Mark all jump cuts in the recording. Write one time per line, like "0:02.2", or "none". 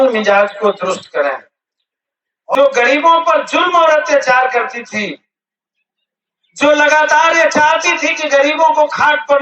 0:02.6

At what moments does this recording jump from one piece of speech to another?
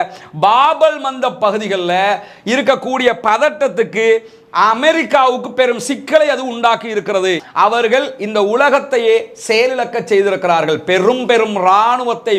0:07.4

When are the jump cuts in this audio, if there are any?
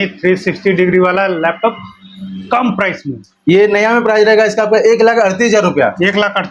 none

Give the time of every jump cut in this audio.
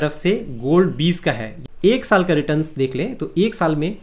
0:01.5

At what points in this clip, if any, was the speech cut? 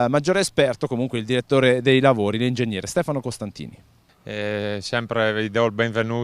0:03.5

